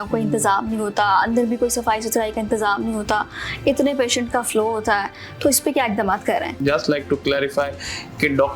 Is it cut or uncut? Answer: cut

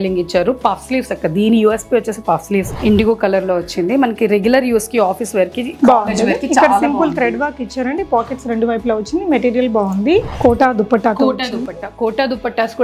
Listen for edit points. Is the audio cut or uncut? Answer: cut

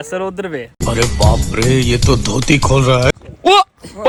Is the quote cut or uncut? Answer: uncut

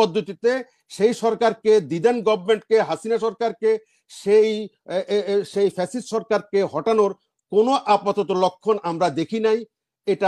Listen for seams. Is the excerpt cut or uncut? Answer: uncut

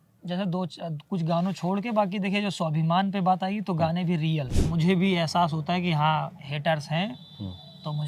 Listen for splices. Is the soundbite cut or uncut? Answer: cut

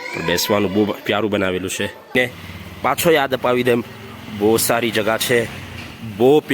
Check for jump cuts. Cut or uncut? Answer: cut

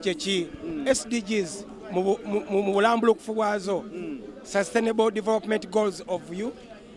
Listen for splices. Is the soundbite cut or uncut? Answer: uncut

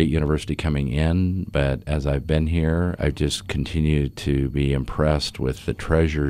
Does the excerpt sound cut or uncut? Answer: cut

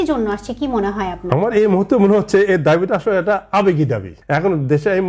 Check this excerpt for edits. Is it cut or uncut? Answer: cut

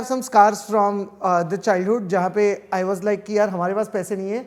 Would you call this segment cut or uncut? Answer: uncut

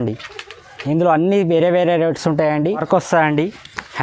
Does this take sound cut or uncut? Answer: cut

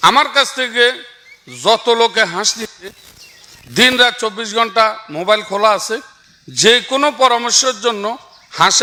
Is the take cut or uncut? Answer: uncut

